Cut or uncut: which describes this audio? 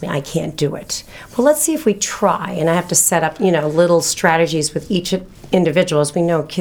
uncut